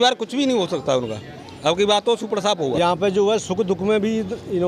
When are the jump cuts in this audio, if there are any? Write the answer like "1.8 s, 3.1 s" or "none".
2.7 s